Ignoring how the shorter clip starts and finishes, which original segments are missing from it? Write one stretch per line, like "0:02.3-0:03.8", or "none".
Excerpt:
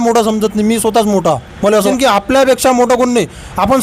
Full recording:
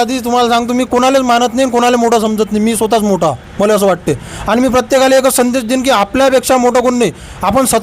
0:03.8-0:05.7